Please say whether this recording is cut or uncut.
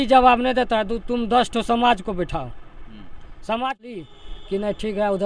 cut